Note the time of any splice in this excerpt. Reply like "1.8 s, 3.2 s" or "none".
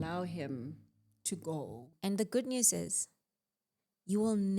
1.9 s